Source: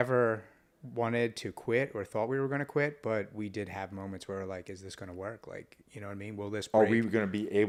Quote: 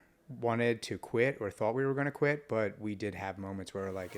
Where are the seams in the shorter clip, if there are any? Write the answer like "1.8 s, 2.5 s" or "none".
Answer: none